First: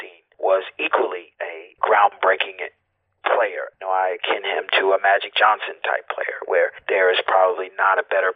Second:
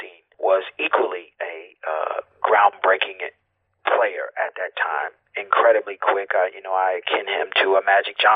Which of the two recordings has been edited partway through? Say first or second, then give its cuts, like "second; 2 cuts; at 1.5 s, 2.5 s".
first; 3 cuts; at 1.6 s, 3.7 s, 6.8 s